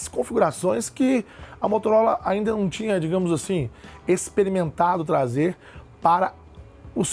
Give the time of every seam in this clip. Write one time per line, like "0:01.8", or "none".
none